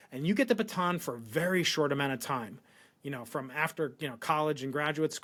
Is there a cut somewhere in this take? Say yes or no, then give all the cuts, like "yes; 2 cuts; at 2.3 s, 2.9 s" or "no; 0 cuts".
no; 0 cuts